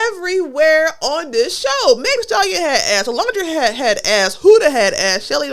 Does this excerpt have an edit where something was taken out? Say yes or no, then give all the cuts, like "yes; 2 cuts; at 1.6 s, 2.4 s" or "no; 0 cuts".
no; 0 cuts